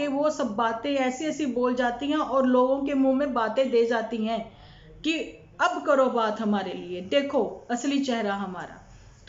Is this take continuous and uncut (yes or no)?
yes